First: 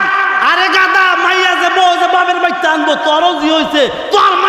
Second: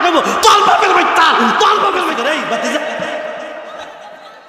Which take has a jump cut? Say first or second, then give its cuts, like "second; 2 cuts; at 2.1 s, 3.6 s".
second; 1 cut; at 2.2 s